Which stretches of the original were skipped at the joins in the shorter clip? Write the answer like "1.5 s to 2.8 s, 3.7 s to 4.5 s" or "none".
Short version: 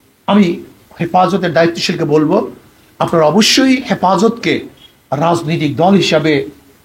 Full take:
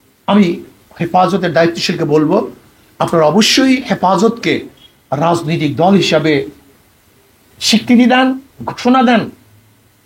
none